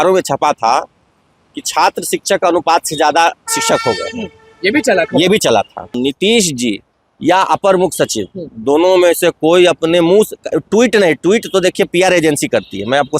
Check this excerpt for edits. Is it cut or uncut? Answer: cut